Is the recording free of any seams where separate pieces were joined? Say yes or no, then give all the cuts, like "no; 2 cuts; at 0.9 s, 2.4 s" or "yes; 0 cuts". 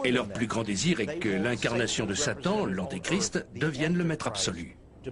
yes; 0 cuts